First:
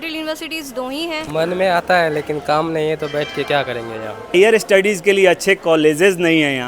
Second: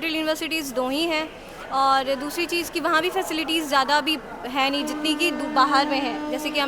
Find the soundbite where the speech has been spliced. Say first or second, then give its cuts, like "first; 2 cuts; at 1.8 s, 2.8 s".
first; 2 cuts; at 1.2 s, 4.3 s